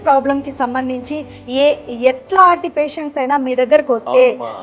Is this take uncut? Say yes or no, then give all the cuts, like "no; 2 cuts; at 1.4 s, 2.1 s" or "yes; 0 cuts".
yes; 0 cuts